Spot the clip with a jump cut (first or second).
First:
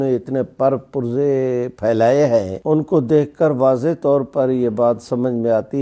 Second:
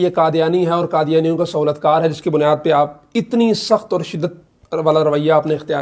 first